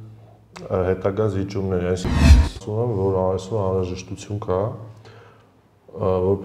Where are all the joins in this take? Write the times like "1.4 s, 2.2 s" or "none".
2.2 s